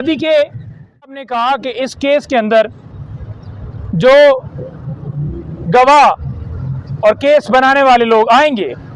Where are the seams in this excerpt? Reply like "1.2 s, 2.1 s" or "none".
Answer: 1.1 s